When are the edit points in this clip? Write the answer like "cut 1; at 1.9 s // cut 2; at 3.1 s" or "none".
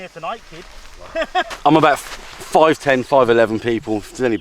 cut 1; at 1.5 s

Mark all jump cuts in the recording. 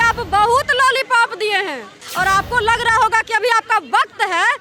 cut 1; at 2.0 s

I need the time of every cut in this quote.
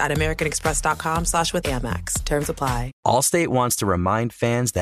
cut 1; at 2.9 s

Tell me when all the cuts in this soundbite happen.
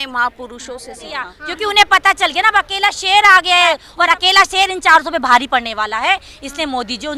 cut 1; at 1.4 s // cut 2; at 3.9 s

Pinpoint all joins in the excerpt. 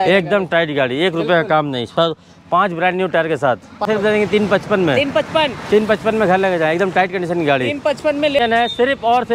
cut 1; at 3.9 s // cut 2; at 8.4 s

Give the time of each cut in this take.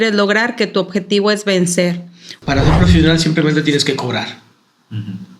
cut 1; at 2.2 s

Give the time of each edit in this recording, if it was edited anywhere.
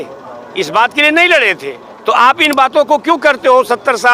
none

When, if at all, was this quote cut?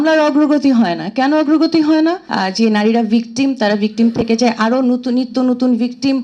cut 1; at 2.3 s

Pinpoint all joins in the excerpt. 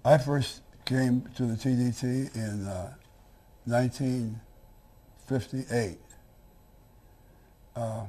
cut 1; at 2.2 s

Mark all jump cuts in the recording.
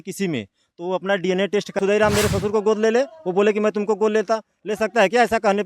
cut 1; at 1.8 s

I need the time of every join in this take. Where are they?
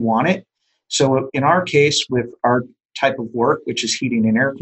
cut 1; at 2.9 s

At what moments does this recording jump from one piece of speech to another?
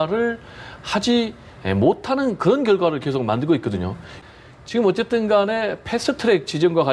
cut 1; at 4.1 s

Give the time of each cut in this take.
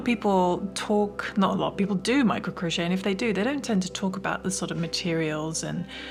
none

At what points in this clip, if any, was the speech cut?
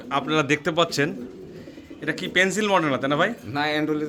none

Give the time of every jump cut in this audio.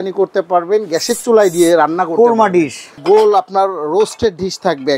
cut 1; at 3.0 s

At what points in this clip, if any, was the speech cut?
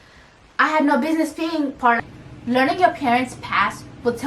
cut 1; at 2.0 s

